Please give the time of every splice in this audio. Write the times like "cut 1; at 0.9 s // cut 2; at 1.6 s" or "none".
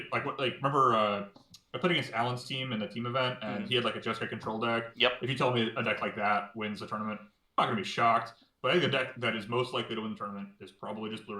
none